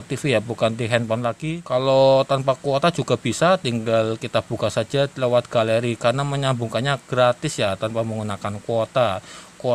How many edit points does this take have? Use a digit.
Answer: 1